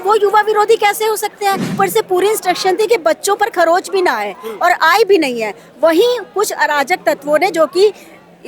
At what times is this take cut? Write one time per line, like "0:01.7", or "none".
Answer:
0:01.7